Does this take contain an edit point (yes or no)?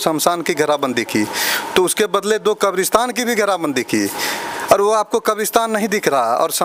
no